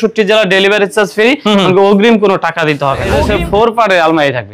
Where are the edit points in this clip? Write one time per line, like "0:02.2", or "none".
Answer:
0:03.1